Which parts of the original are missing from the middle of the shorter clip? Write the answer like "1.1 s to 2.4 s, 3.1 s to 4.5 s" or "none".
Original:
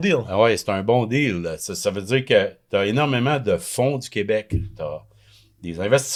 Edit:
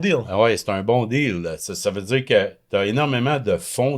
none